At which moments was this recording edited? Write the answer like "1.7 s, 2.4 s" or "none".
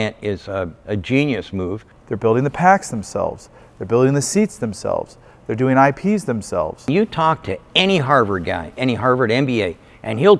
1.9 s, 6.9 s